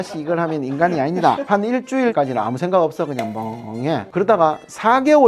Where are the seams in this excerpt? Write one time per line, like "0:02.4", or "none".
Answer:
0:04.1